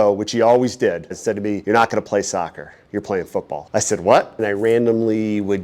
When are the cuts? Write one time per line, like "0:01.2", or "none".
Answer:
0:01.1
0:04.4